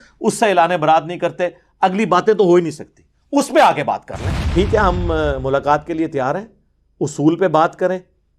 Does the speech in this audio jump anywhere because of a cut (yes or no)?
yes